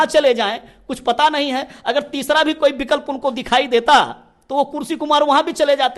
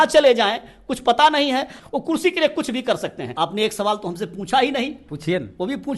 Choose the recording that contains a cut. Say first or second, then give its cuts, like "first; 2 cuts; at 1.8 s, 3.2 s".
second; 2 cuts; at 1.7 s, 3.3 s